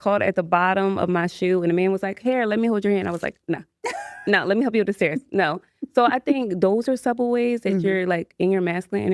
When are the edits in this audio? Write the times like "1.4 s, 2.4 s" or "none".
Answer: none

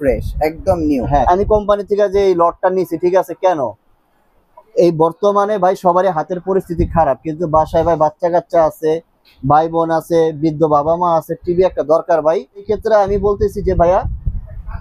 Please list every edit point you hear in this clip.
1.2 s, 12.7 s

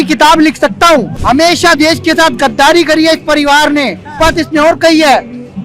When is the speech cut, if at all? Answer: 1.1 s, 4.1 s

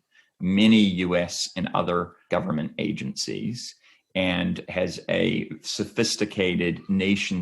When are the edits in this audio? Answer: 2.2 s, 4.6 s

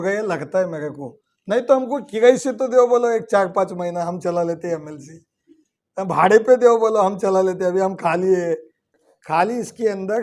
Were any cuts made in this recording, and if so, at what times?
9.1 s

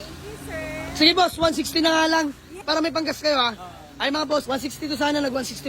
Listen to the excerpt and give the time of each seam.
2.6 s, 4.4 s

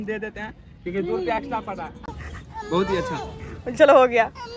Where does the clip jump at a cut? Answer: 2.1 s

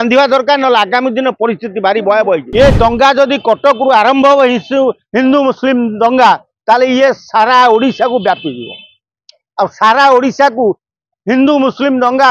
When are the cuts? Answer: 2.5 s

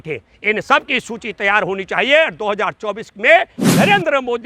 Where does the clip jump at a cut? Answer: none

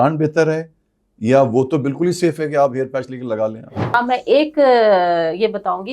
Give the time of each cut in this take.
3.9 s

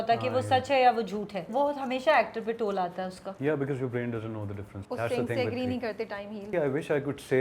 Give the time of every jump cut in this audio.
1.5 s, 3.2 s, 4.7 s, 6.5 s

